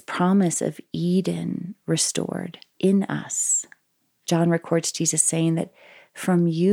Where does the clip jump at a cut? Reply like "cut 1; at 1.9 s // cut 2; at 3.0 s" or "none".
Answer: cut 1; at 2.7 s